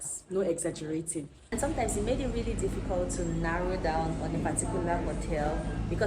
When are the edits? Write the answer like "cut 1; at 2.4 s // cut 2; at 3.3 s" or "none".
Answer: cut 1; at 1.5 s